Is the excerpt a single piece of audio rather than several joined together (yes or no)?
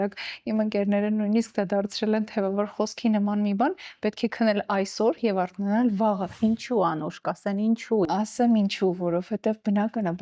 no